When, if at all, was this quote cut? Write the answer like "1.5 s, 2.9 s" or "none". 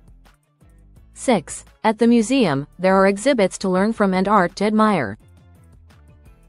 1.2 s, 5.2 s